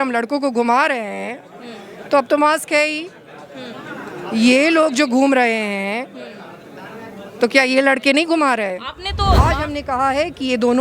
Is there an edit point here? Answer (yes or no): yes